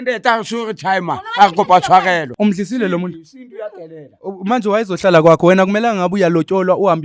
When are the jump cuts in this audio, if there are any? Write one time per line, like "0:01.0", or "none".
0:02.3